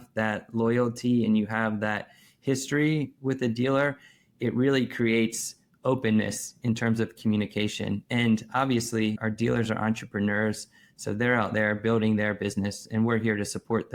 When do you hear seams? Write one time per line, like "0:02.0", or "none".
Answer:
none